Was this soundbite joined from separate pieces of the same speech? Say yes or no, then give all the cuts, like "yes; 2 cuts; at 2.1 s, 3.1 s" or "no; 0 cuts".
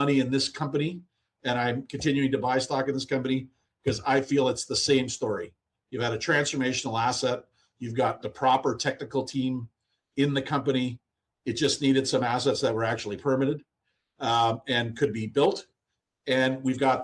no; 0 cuts